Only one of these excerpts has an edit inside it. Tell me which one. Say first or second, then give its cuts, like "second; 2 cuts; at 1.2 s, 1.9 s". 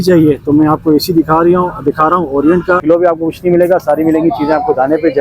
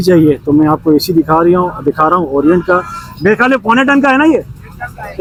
first; 1 cut; at 2.8 s